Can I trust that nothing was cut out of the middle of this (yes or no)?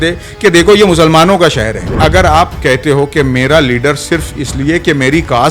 no